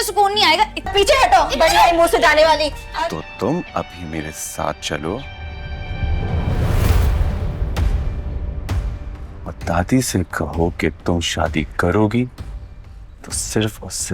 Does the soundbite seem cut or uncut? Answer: cut